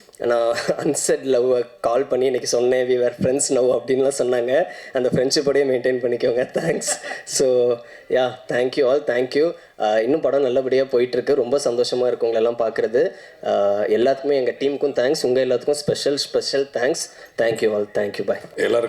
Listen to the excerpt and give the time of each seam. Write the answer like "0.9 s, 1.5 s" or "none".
none

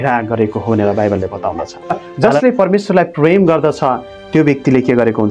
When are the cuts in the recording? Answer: 2.1 s

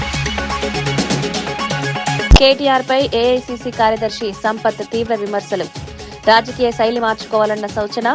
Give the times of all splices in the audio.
2.3 s

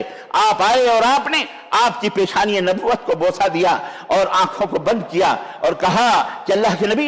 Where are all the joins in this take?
none

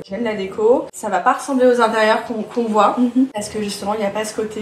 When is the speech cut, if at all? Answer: 1.0 s

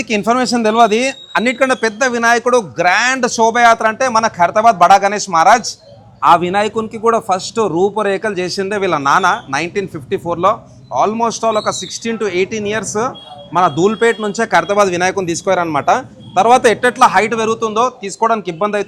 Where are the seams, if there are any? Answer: none

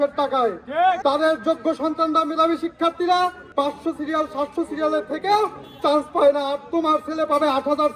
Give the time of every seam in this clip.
1.0 s, 3.4 s

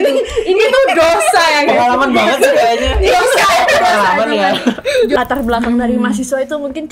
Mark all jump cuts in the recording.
5.2 s

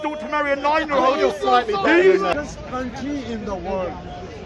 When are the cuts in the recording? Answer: 2.3 s

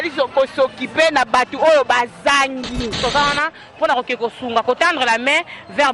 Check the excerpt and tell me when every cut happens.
3.0 s

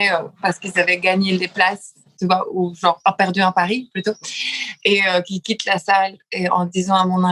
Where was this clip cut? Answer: none

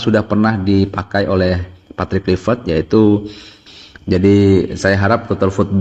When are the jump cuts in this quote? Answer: 3.6 s

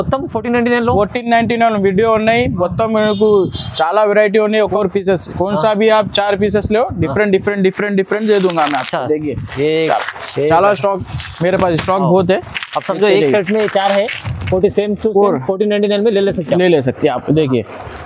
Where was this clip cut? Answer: 4.7 s

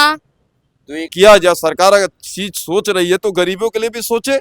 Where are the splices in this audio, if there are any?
1.1 s

